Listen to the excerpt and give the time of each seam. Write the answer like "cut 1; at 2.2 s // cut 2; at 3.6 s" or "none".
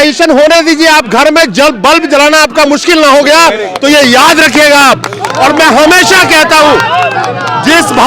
none